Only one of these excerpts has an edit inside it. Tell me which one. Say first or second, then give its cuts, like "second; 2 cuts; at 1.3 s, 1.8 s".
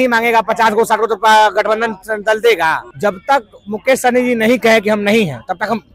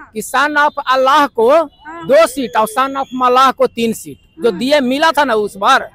first; 1 cut; at 2.9 s